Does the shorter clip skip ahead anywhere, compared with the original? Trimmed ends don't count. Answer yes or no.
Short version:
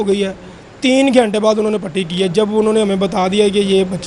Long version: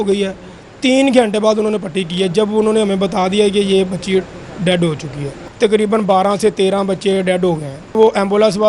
no